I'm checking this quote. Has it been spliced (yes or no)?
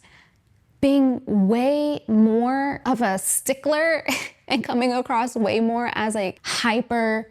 yes